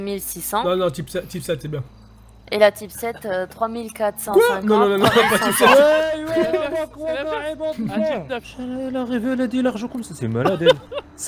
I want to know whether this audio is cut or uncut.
cut